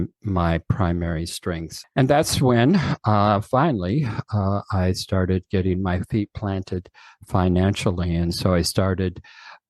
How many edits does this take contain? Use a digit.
1